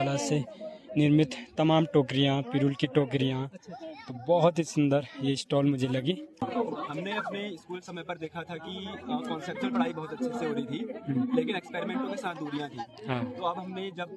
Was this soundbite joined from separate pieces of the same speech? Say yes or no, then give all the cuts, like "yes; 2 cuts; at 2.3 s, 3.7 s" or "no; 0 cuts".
yes; 1 cut; at 6.4 s